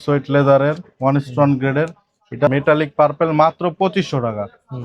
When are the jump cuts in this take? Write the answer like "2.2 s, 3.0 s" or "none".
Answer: 2.5 s

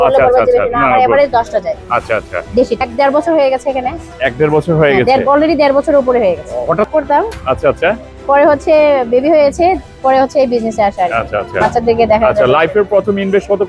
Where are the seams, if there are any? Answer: 2.9 s, 6.9 s

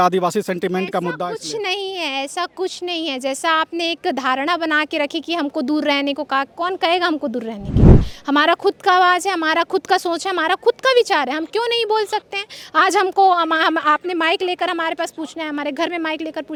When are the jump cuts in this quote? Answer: none

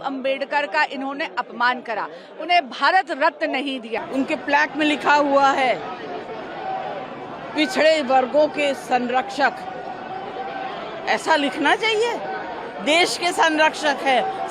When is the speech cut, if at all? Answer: 4.0 s

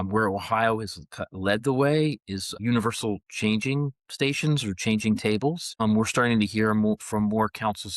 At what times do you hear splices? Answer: 2.6 s, 5.7 s

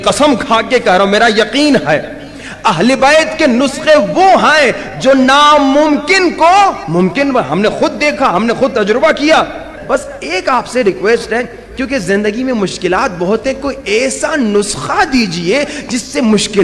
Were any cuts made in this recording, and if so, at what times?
9.7 s

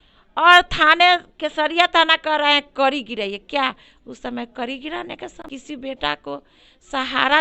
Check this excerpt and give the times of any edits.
5.5 s

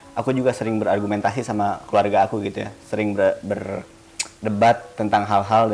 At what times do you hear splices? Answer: none

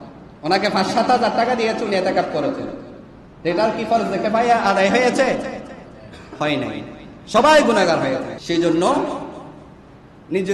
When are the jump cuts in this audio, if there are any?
8.3 s

